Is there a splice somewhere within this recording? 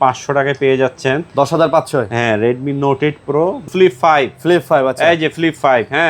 yes; 1 cut; at 3.7 s

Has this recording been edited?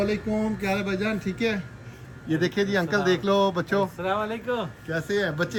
no; 0 cuts

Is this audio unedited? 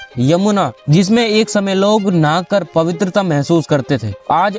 yes; 0 cuts

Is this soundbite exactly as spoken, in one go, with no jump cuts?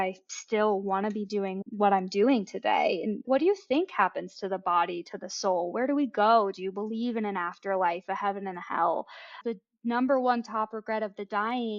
no; 3 cuts; at 1.6 s, 3.2 s, 9.4 s

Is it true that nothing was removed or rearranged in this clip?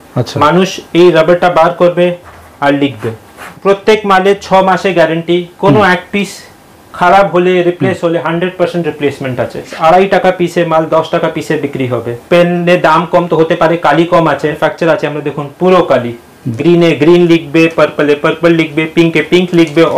no; 5 cuts; at 3.5 s, 9.7 s, 12.2 s, 14.6 s, 16.4 s

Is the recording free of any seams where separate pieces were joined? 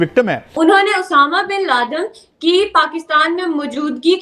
yes; 0 cuts

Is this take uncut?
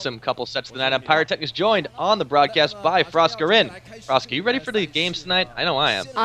yes; 0 cuts

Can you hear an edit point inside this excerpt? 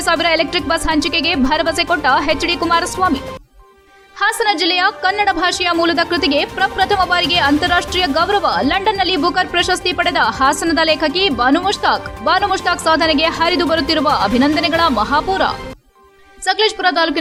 no; 0 cuts

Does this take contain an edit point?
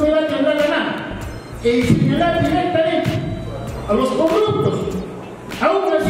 no; 0 cuts

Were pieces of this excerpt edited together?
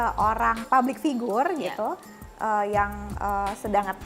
no; 0 cuts

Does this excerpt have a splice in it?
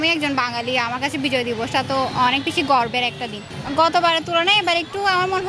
yes; 1 cut; at 3.5 s

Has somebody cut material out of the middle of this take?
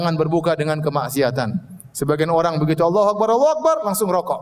no; 0 cuts

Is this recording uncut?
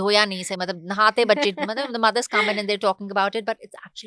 yes; 0 cuts

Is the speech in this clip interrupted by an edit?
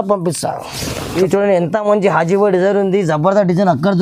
yes; 1 cut; at 1.1 s

